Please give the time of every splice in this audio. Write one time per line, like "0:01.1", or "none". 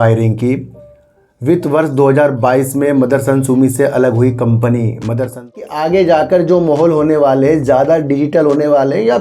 0:05.6